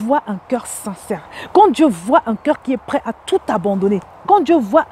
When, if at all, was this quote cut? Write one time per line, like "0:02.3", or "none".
none